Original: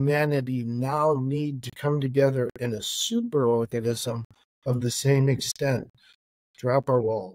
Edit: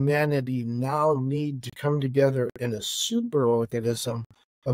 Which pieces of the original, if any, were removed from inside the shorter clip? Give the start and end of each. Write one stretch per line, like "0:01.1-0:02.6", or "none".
none